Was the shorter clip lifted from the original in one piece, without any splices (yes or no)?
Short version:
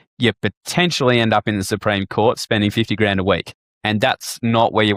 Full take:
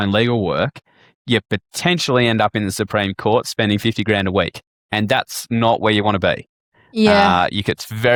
yes